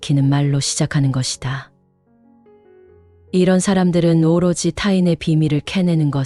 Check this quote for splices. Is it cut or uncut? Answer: uncut